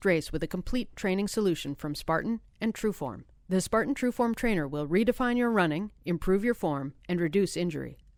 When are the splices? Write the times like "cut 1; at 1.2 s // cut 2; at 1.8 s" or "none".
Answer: none